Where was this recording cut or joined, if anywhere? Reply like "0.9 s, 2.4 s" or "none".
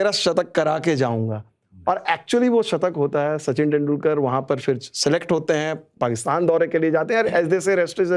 none